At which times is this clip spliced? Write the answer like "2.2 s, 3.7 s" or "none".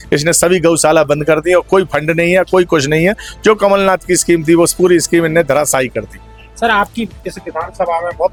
none